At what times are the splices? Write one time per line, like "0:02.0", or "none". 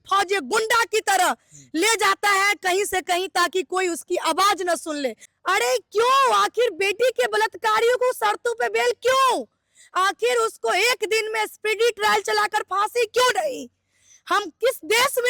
0:05.3